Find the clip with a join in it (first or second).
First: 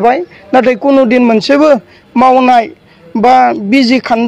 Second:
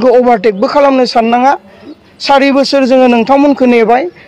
second